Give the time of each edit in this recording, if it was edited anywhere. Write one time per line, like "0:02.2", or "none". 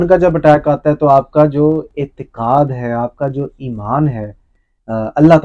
none

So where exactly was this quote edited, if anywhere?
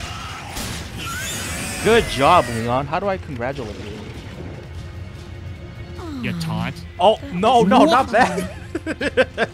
none

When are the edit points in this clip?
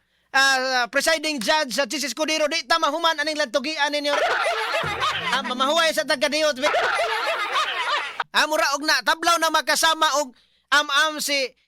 0:08.2

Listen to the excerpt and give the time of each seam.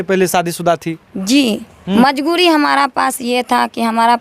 0:01.9

